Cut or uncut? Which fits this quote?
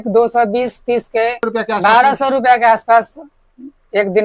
cut